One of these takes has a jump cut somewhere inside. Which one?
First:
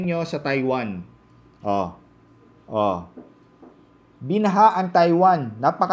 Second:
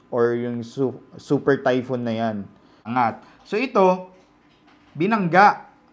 second; 1 cut; at 2.9 s

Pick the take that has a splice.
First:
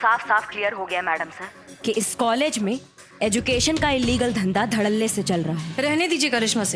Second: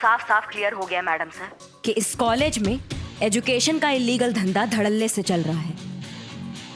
first; 1 cut; at 5.7 s

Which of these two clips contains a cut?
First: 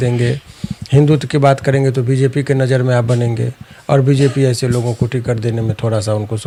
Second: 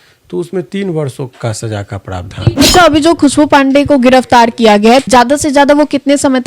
second; 2 cuts; at 2.6 s, 5.1 s

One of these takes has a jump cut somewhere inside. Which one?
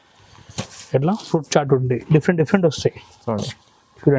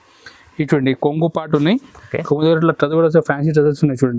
first; 1 cut; at 2.0 s

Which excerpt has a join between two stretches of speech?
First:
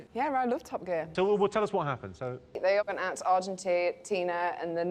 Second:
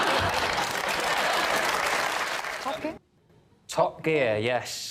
second; 1 cut; at 2.5 s

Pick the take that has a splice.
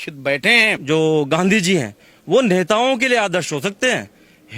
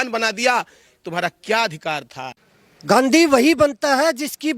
second; 1 cut; at 2.2 s

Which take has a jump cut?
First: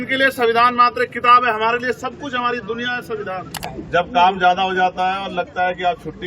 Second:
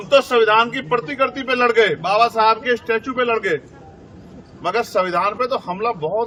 first; 1 cut; at 3.6 s

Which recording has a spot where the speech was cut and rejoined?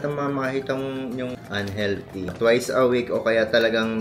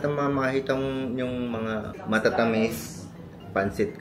first; 2 cuts; at 1.3 s, 2.3 s

